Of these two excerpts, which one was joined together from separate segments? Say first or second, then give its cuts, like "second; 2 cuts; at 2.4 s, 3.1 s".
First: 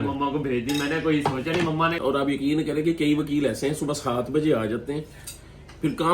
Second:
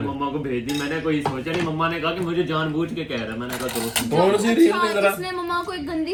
first; 1 cut; at 2.0 s